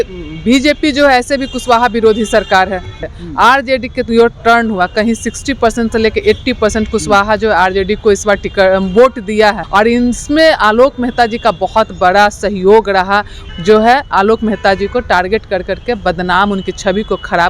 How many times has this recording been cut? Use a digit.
3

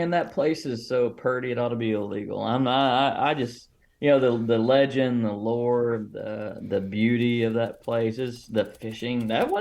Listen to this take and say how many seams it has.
1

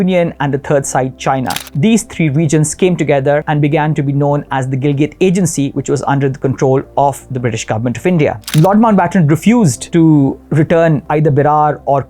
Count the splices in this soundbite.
5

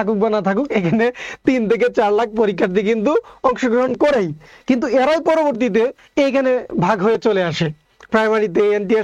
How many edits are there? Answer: 0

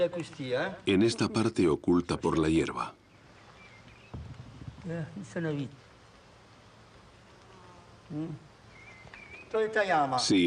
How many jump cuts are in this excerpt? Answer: 1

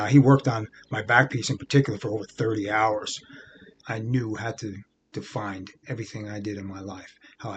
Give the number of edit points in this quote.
1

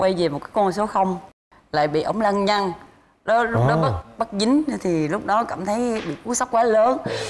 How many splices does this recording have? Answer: 1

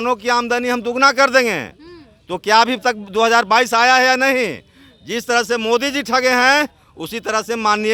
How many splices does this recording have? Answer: 0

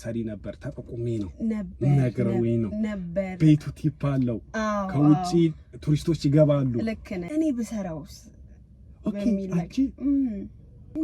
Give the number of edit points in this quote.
1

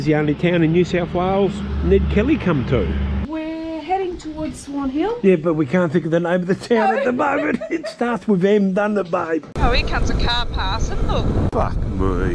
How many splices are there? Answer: 3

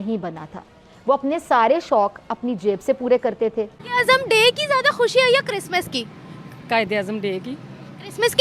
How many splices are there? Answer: 1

